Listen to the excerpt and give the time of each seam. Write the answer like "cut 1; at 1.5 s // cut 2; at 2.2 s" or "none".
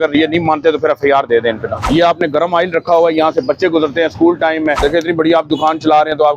cut 1; at 1.8 s // cut 2; at 4.8 s